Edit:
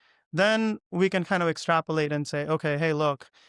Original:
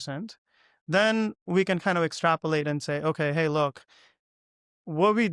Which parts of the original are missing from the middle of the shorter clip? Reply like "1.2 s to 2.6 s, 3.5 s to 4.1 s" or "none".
none